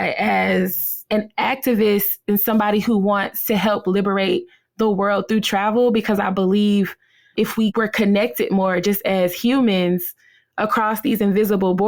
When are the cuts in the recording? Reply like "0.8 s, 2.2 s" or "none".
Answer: none